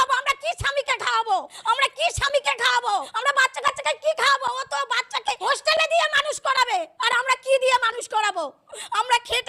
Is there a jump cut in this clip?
yes; 4 cuts; at 1.5 s, 3.1 s, 5.4 s, 6.9 s

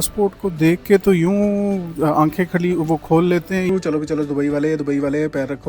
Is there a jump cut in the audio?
yes; 1 cut; at 3.7 s

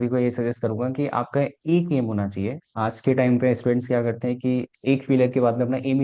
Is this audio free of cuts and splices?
yes; 0 cuts

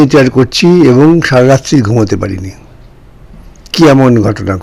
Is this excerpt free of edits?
yes; 0 cuts

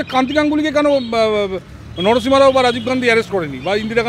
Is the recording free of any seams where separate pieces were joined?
yes; 0 cuts

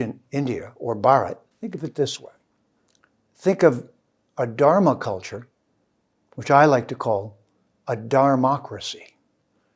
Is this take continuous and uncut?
no; 1 cut; at 1.5 s

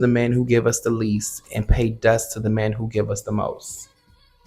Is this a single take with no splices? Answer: yes; 0 cuts

